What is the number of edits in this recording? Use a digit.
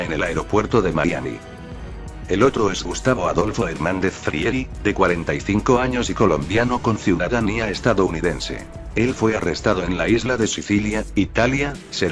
0